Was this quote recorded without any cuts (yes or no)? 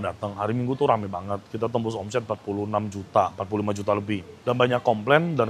yes